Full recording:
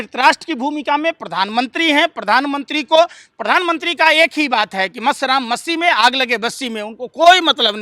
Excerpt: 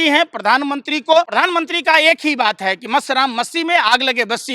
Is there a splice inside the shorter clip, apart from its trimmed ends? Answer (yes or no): yes